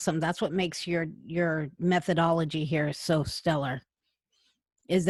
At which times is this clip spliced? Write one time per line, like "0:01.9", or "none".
none